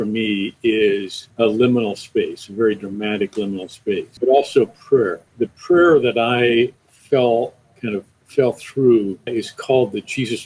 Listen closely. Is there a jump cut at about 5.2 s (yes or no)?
yes